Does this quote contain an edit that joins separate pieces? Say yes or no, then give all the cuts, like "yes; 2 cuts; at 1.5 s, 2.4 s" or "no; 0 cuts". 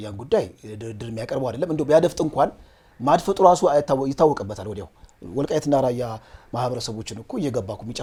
no; 0 cuts